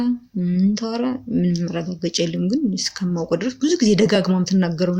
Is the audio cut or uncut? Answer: uncut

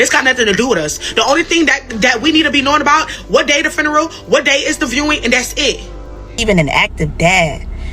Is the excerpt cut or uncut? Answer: cut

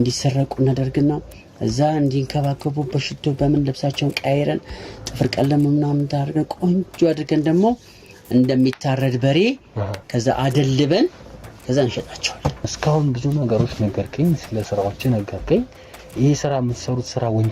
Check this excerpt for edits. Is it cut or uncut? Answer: cut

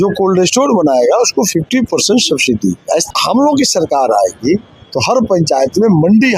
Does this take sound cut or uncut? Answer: cut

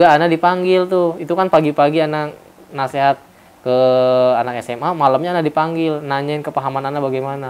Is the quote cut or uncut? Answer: uncut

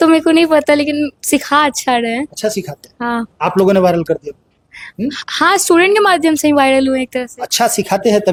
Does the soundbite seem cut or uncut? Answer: uncut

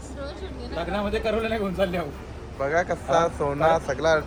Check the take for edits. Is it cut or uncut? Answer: uncut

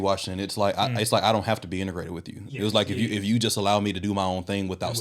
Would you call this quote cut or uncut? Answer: uncut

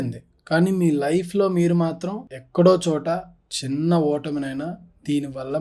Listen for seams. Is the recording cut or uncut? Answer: uncut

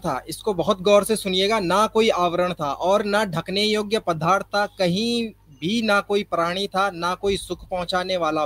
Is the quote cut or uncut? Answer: uncut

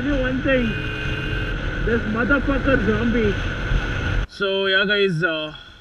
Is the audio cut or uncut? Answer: cut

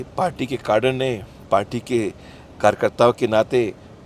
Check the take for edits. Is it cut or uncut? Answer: uncut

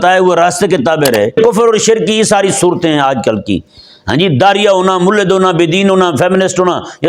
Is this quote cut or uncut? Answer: cut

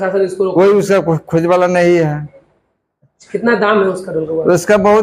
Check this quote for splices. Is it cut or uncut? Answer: uncut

